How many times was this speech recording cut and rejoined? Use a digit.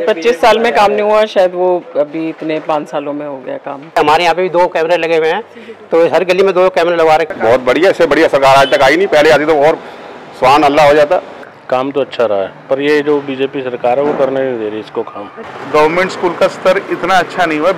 4